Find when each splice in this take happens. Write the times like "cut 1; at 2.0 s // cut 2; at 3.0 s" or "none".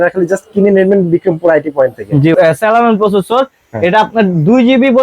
cut 1; at 2.3 s

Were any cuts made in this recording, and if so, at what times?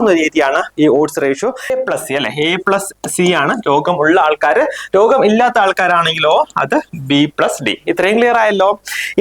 cut 1; at 1.7 s

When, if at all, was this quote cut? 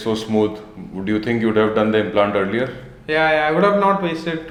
none

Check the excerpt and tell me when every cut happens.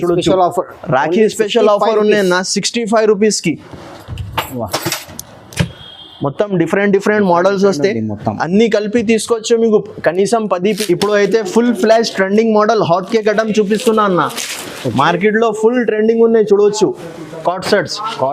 cut 1; at 10.8 s

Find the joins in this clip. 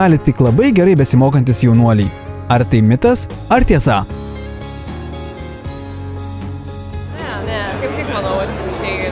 none

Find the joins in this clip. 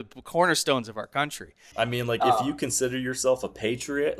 cut 1; at 1.6 s

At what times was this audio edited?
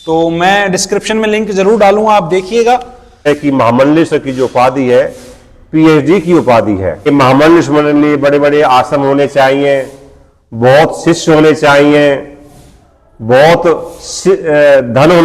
cut 1; at 3.3 s // cut 2; at 7.1 s

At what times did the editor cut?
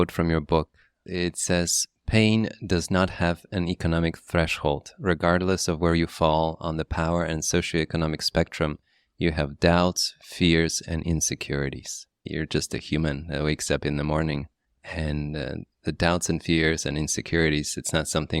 cut 1; at 1.0 s // cut 2; at 12.3 s

